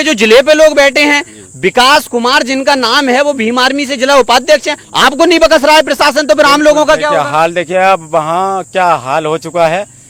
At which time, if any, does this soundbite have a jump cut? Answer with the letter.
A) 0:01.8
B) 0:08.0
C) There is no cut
C